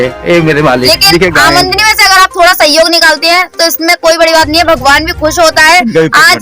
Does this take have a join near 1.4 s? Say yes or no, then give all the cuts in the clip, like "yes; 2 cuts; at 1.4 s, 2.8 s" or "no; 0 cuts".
yes; 1 cut; at 1.4 s